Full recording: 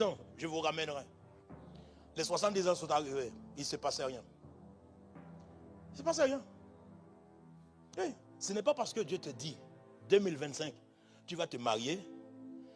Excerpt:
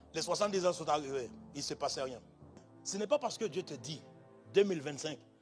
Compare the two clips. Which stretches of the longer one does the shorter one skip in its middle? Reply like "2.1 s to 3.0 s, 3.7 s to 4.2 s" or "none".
4.8 s to 8.3 s